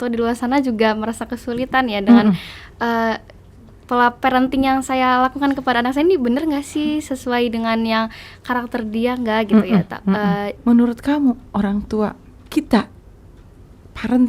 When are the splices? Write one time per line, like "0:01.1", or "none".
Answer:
0:10.5